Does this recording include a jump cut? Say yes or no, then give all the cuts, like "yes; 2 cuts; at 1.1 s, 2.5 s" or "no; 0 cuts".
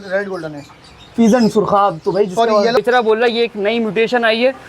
yes; 1 cut; at 2.8 s